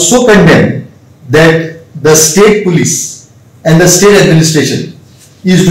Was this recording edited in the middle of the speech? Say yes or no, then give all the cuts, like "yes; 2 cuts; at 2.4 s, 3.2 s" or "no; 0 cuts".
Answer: no; 0 cuts